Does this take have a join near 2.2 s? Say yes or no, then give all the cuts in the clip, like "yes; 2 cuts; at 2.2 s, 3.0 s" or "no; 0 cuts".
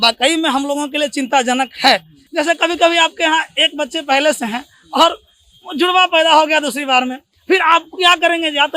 yes; 1 cut; at 2.2 s